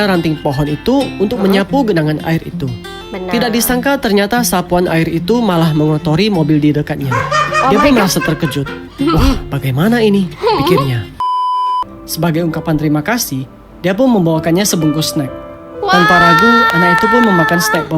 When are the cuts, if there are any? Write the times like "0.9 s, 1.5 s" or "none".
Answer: 11.6 s